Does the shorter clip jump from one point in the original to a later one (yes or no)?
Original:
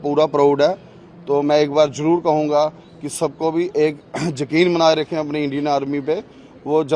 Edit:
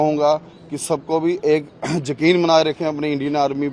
no